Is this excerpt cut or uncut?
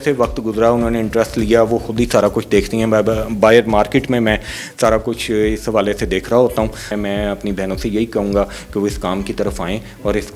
cut